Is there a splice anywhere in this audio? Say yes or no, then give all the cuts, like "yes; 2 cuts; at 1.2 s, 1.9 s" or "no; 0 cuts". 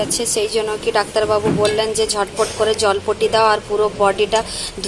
no; 0 cuts